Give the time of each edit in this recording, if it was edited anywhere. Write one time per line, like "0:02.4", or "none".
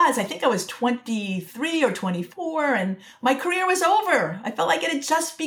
none